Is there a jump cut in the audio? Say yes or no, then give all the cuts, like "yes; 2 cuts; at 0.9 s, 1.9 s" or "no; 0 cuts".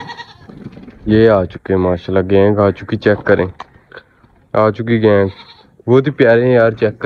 no; 0 cuts